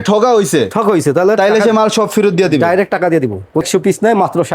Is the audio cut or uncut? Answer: cut